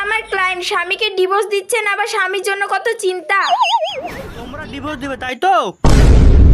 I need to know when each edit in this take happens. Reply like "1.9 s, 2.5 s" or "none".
4.7 s

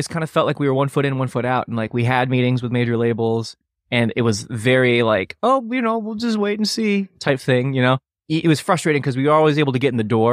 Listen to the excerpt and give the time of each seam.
8.1 s

